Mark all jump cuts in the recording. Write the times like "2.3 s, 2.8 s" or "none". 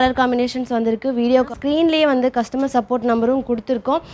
1.5 s

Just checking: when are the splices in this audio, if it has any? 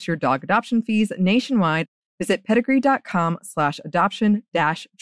none

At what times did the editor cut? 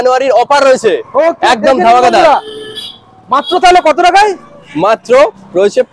none

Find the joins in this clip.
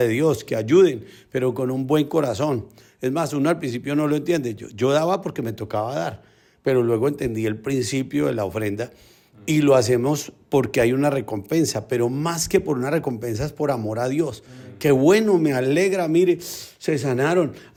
none

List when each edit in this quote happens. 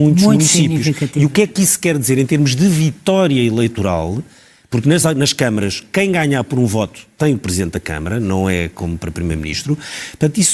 none

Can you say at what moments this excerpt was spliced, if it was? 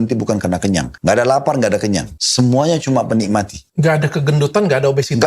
0.9 s, 2.2 s, 3.6 s

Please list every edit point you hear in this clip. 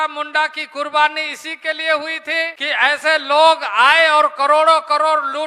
2.6 s

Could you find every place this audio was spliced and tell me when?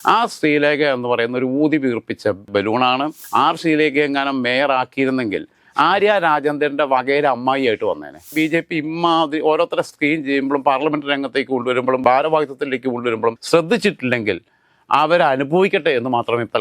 3.1 s, 8.3 s

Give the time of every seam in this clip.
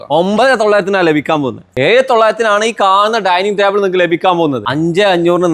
1.6 s, 4.6 s

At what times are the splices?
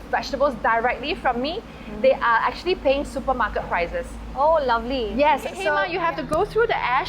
5.8 s

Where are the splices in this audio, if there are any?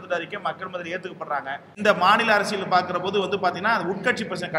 1.7 s

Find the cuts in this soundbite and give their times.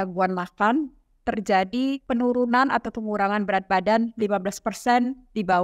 2.0 s

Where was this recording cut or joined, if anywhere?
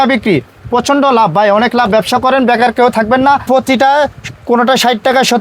3.4 s

